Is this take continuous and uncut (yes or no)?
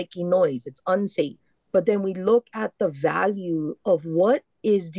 no